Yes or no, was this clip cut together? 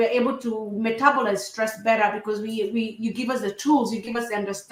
no